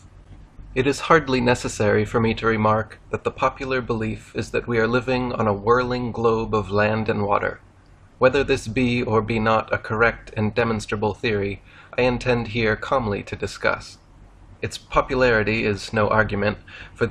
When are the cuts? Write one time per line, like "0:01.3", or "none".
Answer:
none